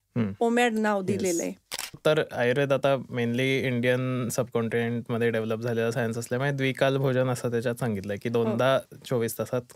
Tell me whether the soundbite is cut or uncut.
cut